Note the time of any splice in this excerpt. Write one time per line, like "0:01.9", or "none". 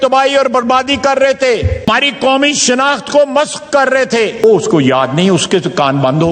0:01.9
0:04.4